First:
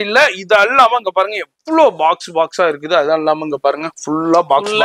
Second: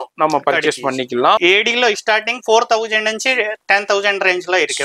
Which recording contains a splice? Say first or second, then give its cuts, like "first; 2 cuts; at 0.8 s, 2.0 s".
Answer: second; 1 cut; at 1.4 s